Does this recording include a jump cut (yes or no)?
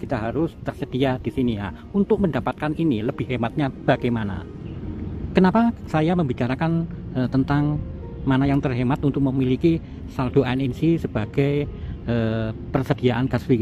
no